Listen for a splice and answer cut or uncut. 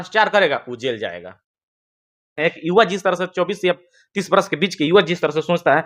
cut